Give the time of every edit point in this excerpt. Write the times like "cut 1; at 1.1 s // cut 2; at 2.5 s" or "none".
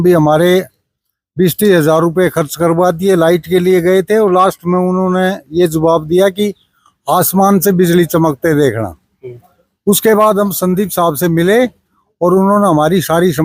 none